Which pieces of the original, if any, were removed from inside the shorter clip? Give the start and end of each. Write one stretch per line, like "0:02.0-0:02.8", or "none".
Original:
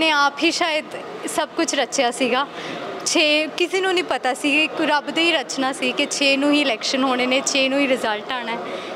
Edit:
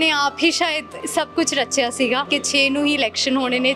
0:00.9-0:01.1
0:02.5-0:05.9

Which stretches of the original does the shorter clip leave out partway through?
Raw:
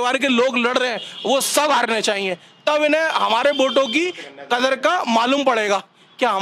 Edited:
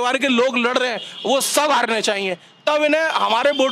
none

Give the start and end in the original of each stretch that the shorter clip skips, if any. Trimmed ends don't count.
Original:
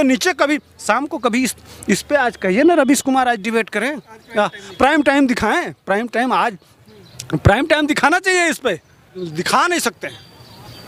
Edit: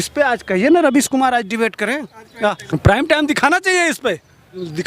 0:04.6-0:07.2

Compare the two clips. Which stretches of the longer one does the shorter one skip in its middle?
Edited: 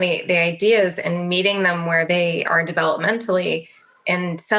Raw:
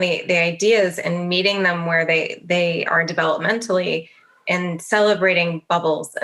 0:02.0-0:02.5

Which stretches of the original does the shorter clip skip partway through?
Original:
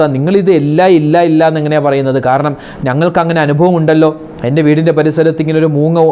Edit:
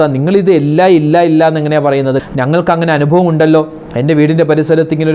0:02.2-0:02.7

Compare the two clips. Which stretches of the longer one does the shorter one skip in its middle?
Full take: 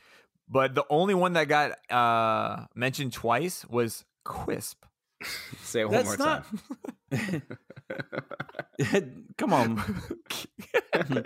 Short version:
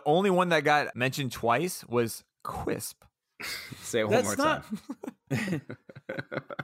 0:01.8-0:02.7

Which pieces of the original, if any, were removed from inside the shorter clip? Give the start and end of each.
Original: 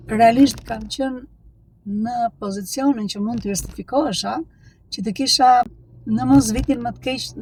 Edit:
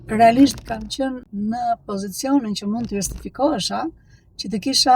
0:01.2-0:01.8

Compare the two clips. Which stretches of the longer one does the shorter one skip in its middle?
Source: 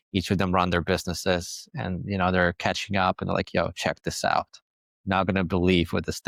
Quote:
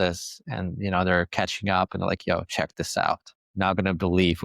0:04.6-0:04.9

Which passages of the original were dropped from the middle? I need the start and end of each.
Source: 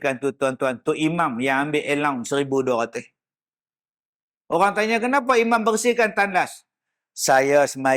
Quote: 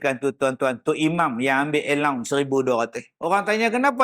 0:03.1-0:04.3

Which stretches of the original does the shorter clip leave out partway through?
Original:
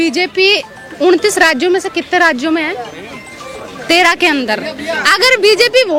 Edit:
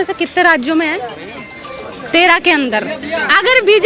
none

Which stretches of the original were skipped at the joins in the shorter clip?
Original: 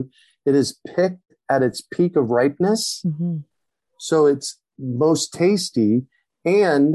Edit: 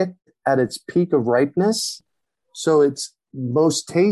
0:03.0-0:03.4

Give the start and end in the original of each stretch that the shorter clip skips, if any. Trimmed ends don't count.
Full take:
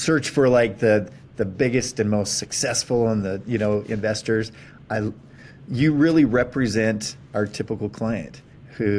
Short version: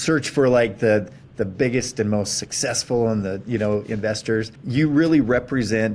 0:04.6-0:05.6

